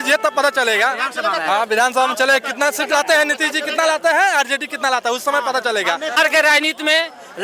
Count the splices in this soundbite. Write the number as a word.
one